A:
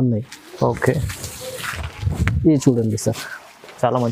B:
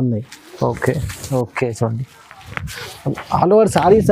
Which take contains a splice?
B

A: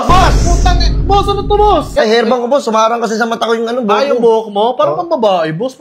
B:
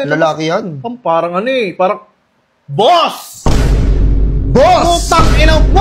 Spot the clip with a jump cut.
A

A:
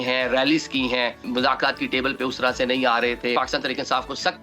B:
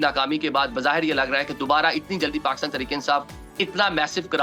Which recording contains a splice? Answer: A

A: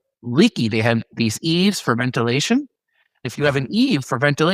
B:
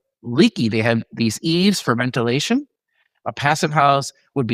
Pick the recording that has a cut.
A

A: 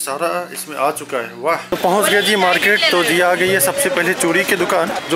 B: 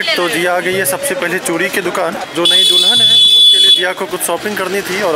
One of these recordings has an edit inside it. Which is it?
A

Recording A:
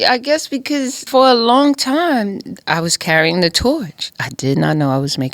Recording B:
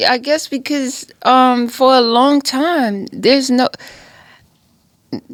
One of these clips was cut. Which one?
A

